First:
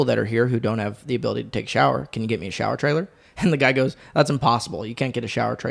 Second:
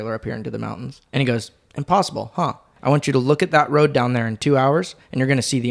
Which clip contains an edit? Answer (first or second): second